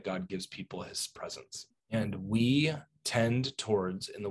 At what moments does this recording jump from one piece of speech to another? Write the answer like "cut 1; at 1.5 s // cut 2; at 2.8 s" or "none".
cut 1; at 1.7 s